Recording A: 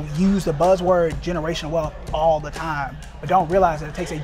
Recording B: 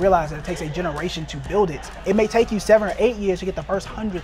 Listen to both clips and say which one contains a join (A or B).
B